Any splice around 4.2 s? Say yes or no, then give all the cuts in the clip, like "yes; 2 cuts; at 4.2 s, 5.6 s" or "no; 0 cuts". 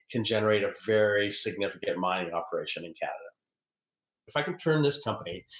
yes; 1 cut; at 4.2 s